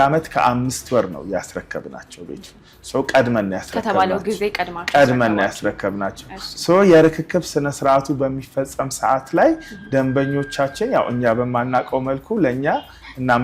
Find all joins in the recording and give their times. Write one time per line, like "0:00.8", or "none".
none

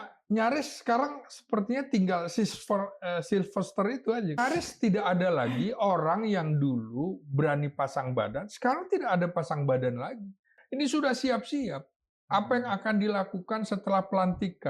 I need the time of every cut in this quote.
0:04.4
0:10.6

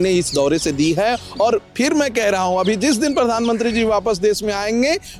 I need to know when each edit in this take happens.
none

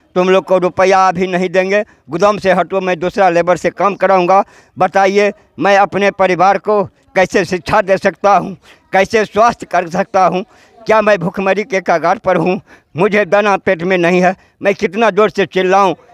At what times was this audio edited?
none

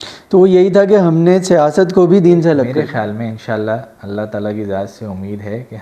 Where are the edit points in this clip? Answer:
0:02.7

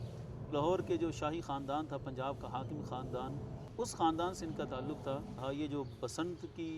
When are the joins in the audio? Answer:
0:03.6
0:05.4

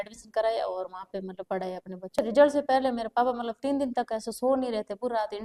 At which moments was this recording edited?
0:02.2

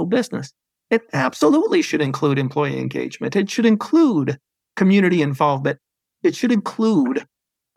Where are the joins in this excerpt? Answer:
none

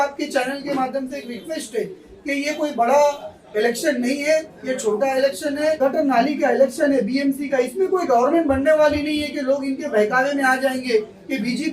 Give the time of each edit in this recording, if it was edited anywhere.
0:05.8

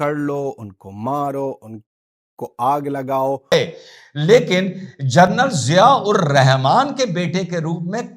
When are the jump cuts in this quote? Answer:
0:03.5

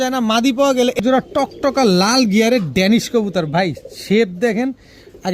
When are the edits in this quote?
0:01.0

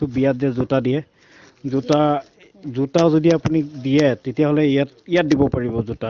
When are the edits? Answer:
none

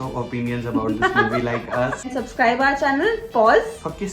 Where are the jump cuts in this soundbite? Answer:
0:02.2

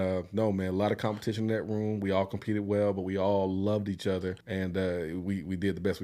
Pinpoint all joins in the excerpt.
0:04.4

